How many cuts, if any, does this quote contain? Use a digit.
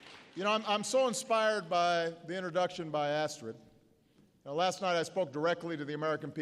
0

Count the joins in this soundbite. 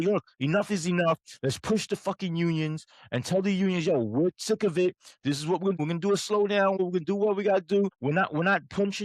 3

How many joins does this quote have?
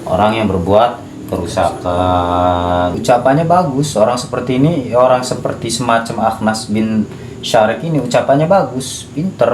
1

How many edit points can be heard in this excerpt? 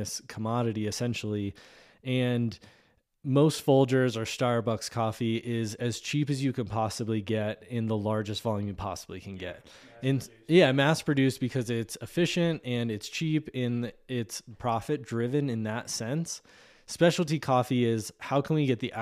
0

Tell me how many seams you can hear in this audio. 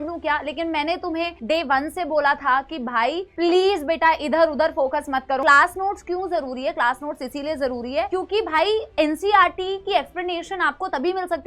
1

